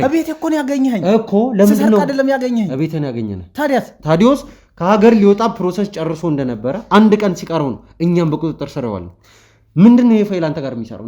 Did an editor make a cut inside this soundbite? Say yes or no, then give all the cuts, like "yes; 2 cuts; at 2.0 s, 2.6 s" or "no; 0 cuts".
yes; 1 cut; at 3.9 s